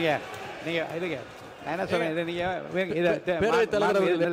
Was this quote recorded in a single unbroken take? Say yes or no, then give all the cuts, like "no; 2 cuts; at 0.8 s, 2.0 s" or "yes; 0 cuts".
yes; 0 cuts